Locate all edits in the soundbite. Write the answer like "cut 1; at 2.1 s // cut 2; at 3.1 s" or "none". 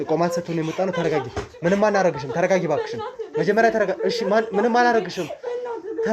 none